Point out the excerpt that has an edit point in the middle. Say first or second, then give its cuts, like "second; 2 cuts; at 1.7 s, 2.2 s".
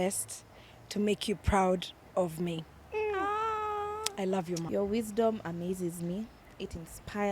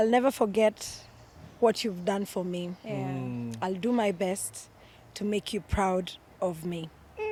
first; 1 cut; at 4.7 s